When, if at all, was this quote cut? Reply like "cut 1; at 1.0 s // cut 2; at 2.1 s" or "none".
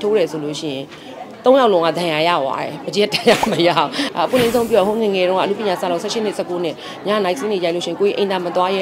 cut 1; at 4.0 s